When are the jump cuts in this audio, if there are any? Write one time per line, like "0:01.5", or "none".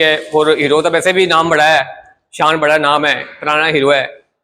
none